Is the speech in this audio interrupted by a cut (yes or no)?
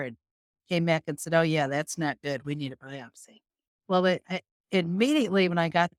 no